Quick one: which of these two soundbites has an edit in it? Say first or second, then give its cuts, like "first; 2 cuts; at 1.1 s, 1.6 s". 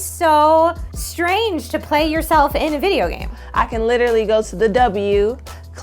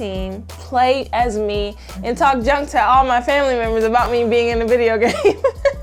first; 1 cut; at 3.4 s